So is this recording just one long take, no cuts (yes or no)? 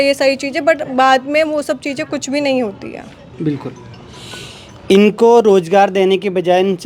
yes